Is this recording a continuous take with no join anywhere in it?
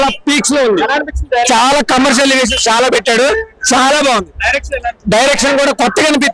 no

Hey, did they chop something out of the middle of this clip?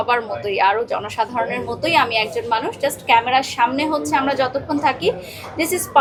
no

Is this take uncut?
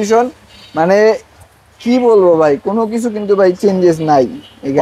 yes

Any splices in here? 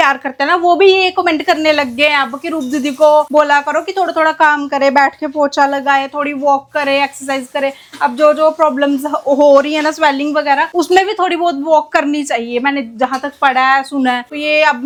no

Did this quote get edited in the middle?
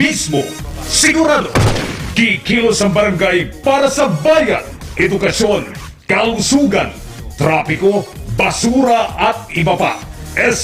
yes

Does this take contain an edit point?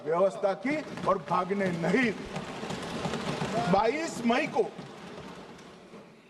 no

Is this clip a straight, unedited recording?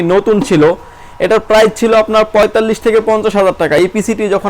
yes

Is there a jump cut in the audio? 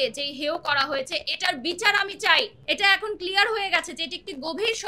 yes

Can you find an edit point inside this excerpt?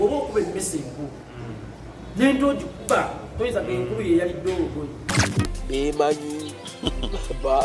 yes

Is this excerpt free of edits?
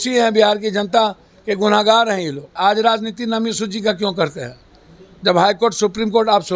no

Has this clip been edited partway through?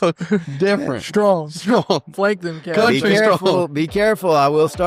yes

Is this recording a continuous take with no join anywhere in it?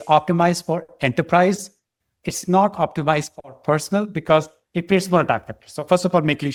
yes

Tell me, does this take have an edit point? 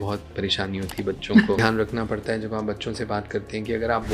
yes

